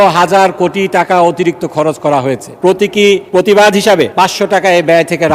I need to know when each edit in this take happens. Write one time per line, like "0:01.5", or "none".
0:02.5
0:03.2
0:04.1